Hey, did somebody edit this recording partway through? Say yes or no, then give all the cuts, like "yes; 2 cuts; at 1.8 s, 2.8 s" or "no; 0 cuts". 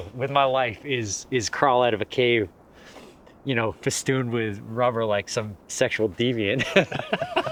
no; 0 cuts